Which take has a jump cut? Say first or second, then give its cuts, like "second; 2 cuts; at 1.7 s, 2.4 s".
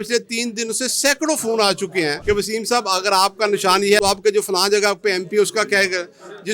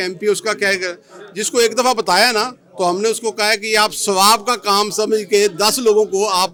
first; 2 cuts; at 2.2 s, 4.0 s